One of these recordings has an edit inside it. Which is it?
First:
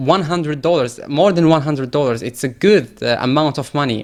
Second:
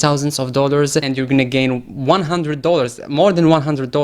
second; 1 cut; at 1.1 s

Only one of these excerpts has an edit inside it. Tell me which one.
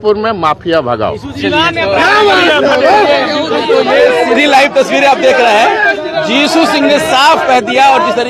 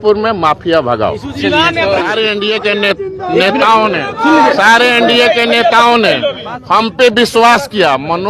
second; 1 cut; at 2.0 s

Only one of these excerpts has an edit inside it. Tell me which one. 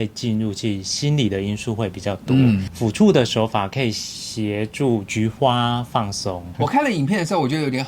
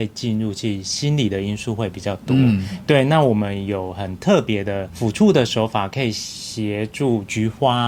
first; 2 cuts; at 2.7 s, 6.4 s

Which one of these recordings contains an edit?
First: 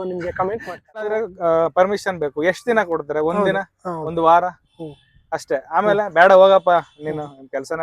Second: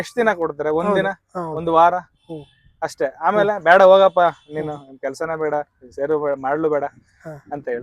first; 1 cut; at 1.3 s

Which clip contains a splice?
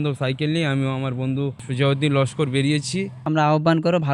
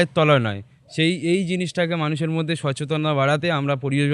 first; 2 cuts; at 1.6 s, 3.2 s

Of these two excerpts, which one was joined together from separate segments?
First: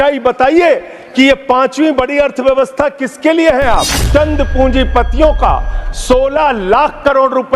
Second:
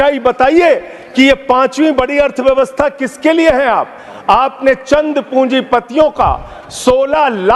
first; 1 cut; at 4.0 s

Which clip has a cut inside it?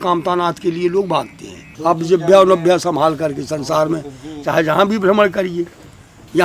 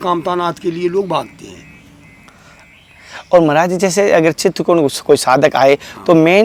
first; 1 cut; at 1.7 s

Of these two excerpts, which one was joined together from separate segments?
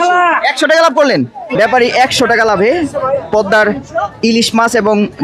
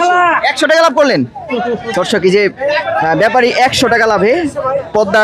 first; 1 cut; at 1.5 s

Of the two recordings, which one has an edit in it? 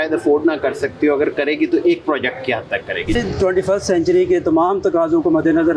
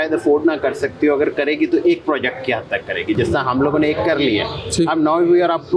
first; 1 cut; at 3.1 s

